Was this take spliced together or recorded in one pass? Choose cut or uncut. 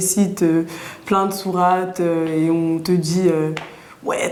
uncut